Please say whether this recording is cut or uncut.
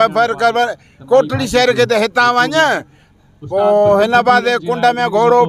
uncut